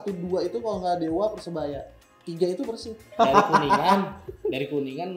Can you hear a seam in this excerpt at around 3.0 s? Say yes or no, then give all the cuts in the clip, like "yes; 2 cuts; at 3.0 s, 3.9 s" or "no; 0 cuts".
yes; 1 cut; at 3.0 s